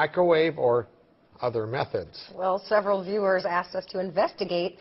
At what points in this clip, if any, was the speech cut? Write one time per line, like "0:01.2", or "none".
none